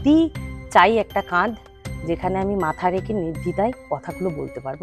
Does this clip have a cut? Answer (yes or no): no